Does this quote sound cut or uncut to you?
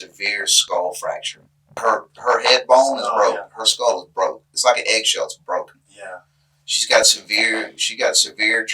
cut